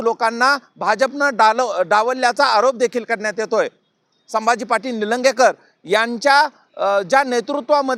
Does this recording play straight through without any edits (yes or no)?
yes